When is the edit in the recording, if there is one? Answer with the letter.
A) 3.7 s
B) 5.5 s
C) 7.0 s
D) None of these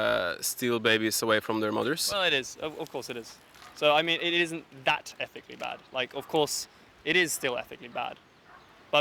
D